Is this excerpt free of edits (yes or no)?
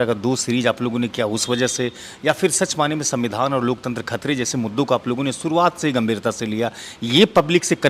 yes